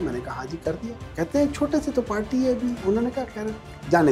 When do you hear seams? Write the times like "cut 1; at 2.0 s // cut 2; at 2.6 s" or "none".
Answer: cut 1; at 2.8 s